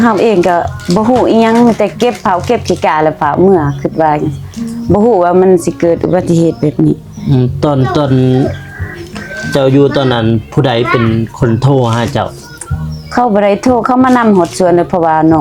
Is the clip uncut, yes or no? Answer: yes